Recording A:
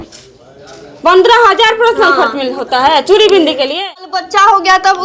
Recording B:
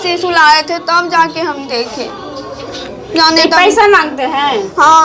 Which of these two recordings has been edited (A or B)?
A